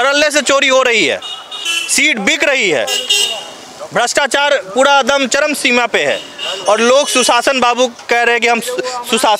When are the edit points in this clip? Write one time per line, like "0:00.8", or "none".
none

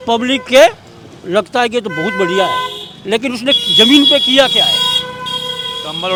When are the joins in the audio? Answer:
none

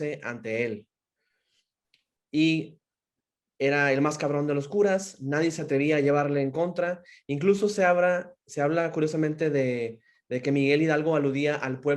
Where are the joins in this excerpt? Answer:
none

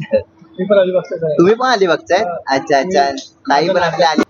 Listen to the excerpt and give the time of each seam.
none

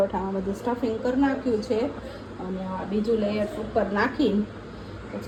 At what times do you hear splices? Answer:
none

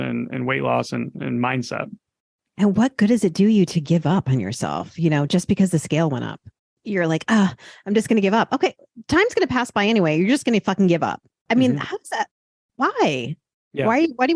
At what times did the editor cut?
none

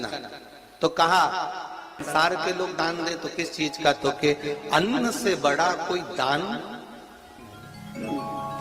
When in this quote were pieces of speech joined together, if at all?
0:02.1

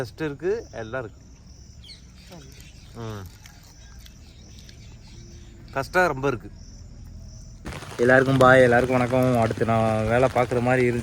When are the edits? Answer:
0:07.8

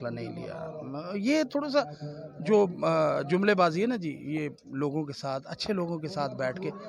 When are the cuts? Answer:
none

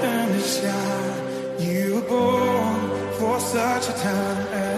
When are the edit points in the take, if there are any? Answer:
none

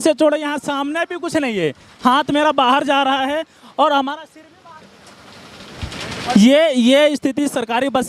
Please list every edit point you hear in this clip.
none

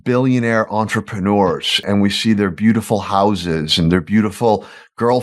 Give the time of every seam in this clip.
0:01.7

